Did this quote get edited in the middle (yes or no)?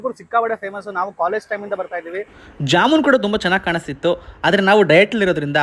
yes